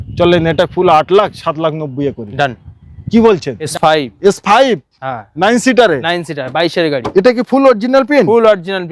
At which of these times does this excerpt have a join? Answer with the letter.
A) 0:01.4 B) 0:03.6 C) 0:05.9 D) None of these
B